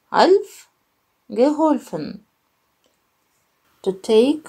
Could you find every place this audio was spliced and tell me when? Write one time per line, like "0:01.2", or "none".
0:03.4